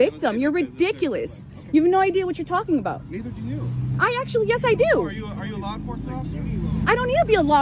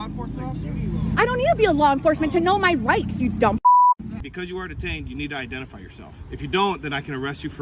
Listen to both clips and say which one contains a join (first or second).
second